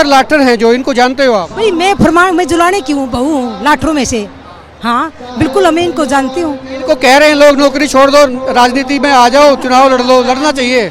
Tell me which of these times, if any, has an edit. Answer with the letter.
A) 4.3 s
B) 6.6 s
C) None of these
C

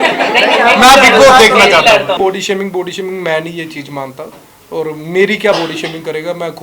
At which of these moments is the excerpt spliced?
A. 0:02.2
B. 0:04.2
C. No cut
A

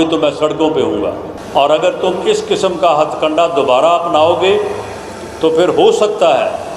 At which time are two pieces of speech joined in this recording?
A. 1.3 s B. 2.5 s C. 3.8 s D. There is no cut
A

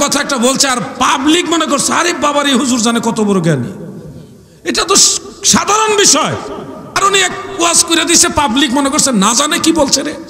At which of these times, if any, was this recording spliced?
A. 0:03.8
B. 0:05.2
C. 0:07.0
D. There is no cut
C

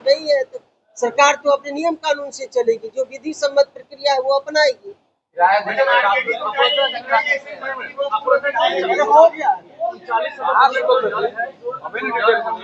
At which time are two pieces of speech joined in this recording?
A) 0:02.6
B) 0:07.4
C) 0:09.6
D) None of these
D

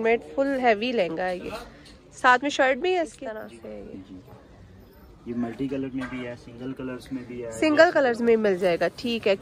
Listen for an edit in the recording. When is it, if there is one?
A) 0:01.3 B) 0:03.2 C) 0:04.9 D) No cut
B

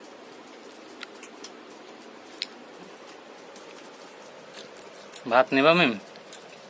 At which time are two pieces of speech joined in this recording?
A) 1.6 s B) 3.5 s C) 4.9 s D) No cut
D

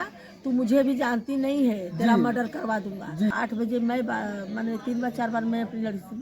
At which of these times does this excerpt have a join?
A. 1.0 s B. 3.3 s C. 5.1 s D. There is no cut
B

